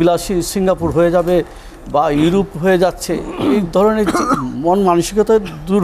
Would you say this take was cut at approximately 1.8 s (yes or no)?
no